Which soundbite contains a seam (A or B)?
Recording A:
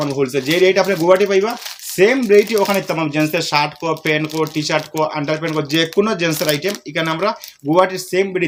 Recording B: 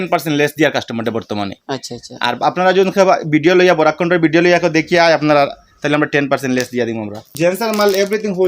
B